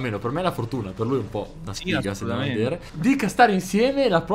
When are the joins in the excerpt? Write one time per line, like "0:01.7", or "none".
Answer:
0:02.9